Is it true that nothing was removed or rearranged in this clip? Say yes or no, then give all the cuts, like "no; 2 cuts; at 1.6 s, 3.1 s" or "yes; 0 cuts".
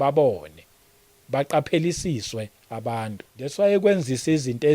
no; 1 cut; at 3.4 s